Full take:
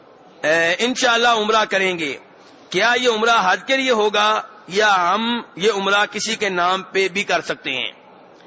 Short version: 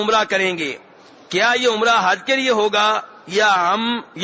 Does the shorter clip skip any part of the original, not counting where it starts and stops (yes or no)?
no